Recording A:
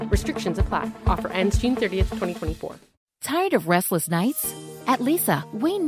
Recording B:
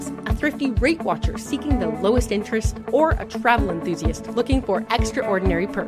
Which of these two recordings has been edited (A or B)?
A